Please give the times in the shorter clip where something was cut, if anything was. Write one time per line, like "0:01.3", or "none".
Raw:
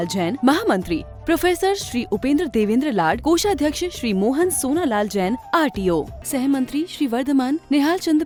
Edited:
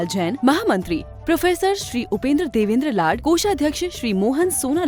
none

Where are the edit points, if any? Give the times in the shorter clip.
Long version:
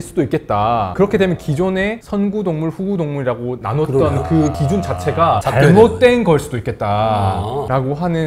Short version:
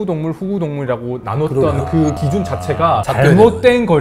none

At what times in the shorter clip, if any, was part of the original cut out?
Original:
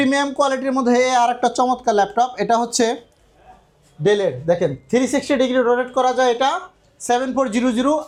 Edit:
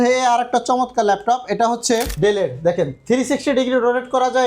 0:02.1

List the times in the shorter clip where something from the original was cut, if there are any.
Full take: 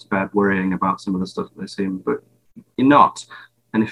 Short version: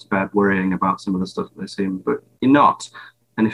0:02.3

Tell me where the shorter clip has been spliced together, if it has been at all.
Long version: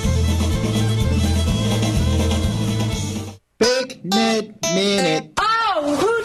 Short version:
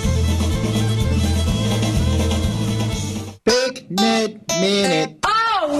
0:03.3

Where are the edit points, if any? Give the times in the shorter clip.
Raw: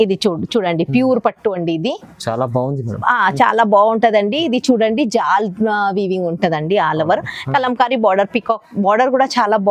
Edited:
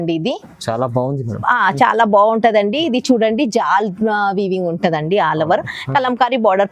none

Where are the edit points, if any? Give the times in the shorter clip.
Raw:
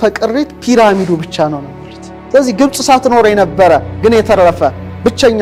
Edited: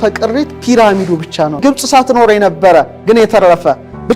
0:01.6

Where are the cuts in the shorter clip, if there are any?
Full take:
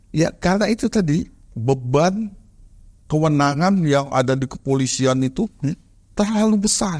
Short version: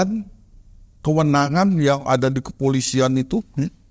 none

